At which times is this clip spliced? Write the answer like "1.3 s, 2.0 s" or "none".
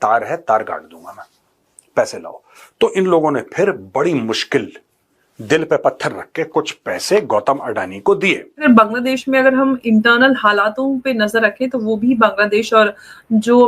8.6 s